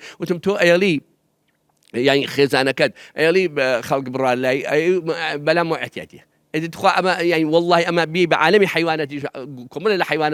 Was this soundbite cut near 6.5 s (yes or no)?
no